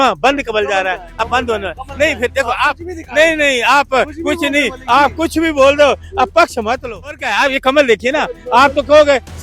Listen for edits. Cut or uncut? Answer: cut